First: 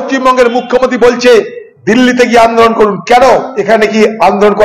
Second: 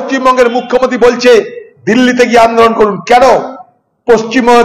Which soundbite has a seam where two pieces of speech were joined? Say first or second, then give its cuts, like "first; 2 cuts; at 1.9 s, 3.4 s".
first; 1 cut; at 3.5 s